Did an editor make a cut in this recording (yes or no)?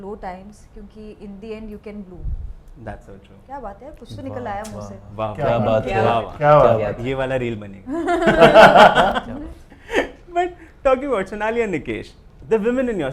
no